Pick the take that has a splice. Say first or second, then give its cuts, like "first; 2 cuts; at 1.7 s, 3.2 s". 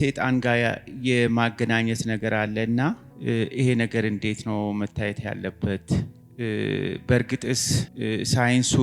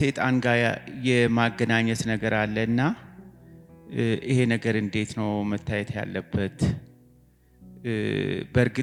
first; 3 cuts; at 3.1 s, 6.2 s, 7.9 s